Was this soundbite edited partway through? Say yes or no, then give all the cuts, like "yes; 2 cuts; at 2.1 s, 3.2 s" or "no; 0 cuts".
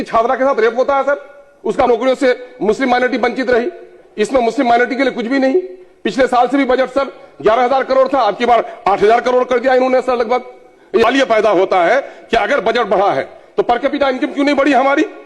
yes; 2 cuts; at 1.9 s, 11.1 s